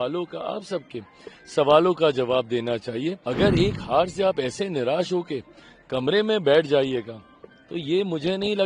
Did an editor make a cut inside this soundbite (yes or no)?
yes